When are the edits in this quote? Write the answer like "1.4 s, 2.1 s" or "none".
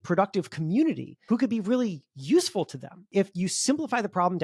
1.1 s, 3.1 s